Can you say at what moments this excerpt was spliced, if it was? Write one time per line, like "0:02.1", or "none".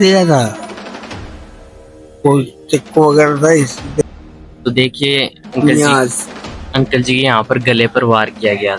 0:04.0